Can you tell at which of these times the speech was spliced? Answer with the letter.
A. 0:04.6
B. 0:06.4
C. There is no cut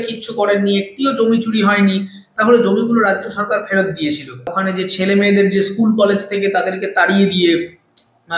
A